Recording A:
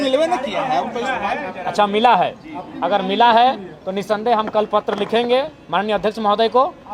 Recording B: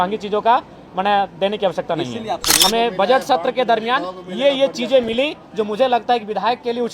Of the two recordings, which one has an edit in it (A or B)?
B